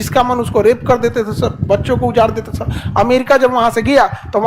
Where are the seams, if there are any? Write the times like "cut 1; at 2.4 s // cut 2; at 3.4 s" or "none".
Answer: none